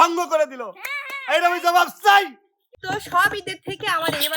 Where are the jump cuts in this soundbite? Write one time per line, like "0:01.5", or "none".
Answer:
0:02.7